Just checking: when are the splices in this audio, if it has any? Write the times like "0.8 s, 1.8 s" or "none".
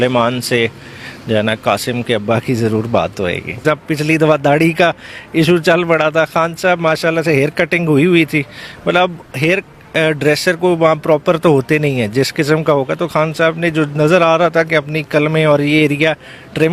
3.6 s